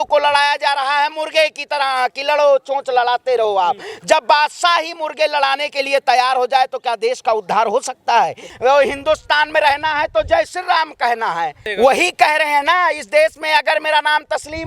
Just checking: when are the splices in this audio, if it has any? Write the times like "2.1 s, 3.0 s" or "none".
8.4 s, 11.6 s